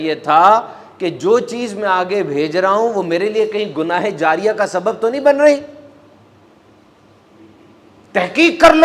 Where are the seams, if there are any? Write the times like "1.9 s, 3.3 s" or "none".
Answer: none